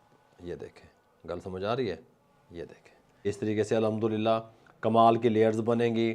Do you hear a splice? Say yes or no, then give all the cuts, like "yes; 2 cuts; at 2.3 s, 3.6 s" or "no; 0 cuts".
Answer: yes; 1 cut; at 3.3 s